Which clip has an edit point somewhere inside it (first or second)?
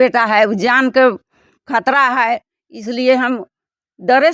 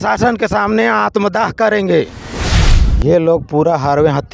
second